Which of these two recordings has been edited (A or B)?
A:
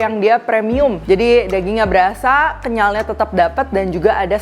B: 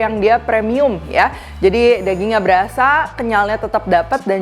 A